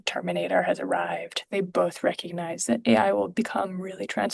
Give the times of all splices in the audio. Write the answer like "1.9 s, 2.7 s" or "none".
1.4 s